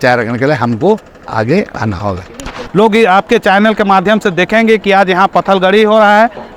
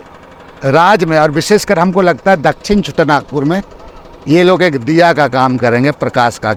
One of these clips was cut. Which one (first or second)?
first